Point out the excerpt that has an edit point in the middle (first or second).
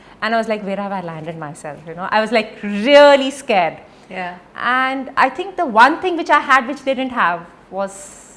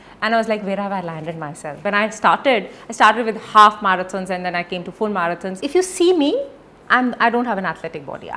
second